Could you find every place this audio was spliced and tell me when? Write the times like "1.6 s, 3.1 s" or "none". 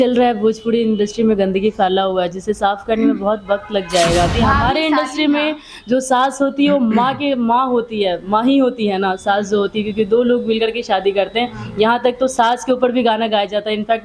4.3 s